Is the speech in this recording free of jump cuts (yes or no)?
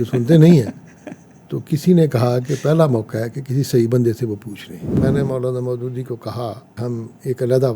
no